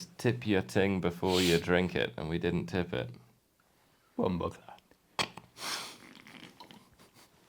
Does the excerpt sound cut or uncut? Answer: uncut